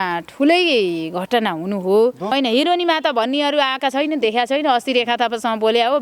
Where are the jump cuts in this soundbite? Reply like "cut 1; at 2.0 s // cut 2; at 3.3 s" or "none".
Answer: cut 1; at 2.3 s

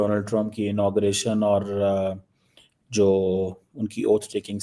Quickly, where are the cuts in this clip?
none

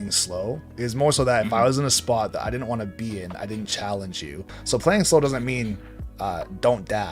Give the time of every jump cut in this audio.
cut 1; at 4.5 s

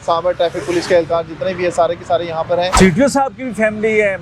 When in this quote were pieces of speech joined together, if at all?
cut 1; at 2.7 s

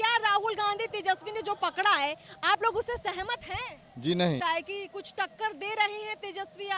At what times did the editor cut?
cut 1; at 4.4 s

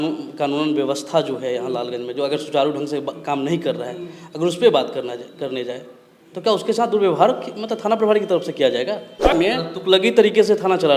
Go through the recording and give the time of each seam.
cut 1; at 9.3 s

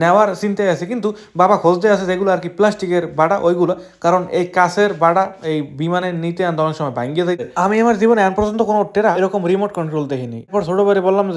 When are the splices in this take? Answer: cut 1; at 7.4 s // cut 2; at 9.1 s // cut 3; at 10.5 s

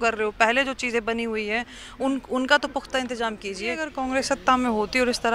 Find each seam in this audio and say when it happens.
cut 1; at 3.9 s

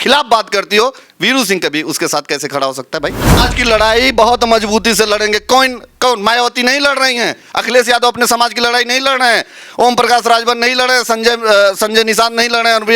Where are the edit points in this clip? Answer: cut 1; at 3.4 s

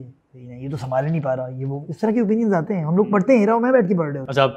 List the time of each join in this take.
none

